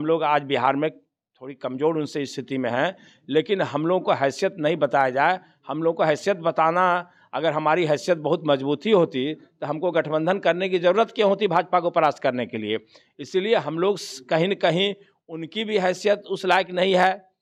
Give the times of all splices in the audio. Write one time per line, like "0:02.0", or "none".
none